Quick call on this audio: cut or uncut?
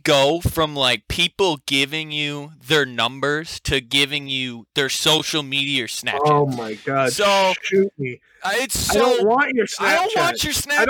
uncut